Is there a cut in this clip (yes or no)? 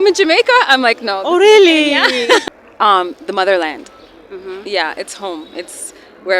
yes